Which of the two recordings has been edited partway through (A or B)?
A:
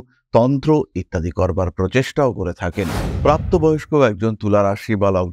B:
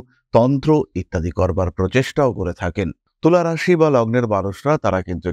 A